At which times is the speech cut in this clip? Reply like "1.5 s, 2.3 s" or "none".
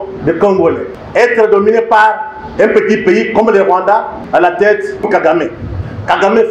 0.9 s, 4.2 s